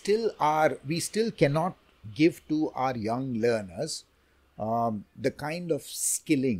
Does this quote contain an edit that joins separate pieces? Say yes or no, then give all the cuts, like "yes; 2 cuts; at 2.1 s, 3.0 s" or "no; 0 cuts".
no; 0 cuts